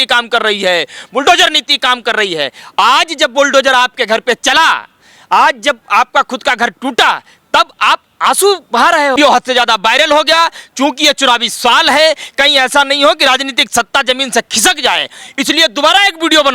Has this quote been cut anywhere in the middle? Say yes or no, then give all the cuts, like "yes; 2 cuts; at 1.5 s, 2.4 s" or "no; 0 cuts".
yes; 1 cut; at 9.2 s